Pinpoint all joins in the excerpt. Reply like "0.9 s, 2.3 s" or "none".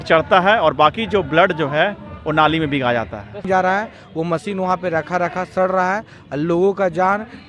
3.4 s